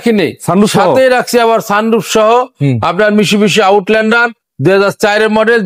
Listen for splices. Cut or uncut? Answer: uncut